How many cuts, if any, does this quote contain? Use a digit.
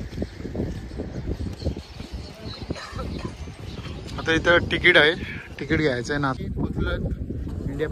1